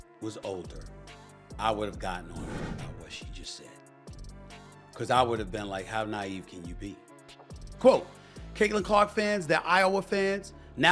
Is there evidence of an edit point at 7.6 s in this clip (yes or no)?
yes